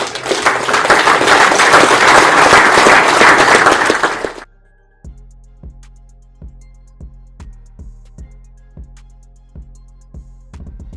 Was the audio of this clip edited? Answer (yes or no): yes